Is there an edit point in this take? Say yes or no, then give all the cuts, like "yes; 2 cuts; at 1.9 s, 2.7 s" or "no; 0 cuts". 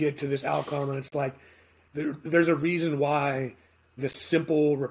no; 0 cuts